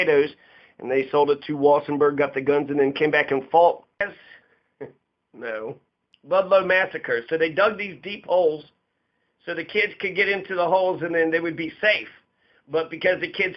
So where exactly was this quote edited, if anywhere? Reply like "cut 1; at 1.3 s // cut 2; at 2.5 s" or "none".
cut 1; at 4.0 s